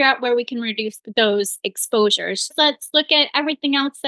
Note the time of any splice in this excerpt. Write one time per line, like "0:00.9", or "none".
0:01.0
0:02.5